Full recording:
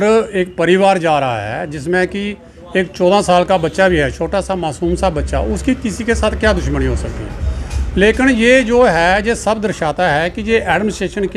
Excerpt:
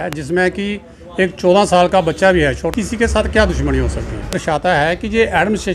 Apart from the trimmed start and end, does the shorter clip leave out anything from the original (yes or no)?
yes